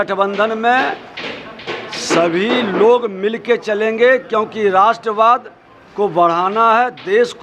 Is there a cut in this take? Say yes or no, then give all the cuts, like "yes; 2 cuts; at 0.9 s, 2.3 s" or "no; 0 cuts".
no; 0 cuts